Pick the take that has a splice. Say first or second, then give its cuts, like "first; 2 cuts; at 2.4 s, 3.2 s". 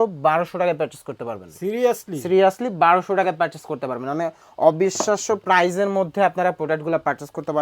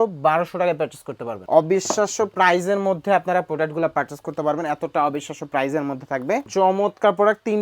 second; 2 cuts; at 1.3 s, 6.5 s